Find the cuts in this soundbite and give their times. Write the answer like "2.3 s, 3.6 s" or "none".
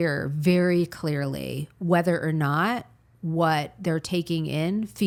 none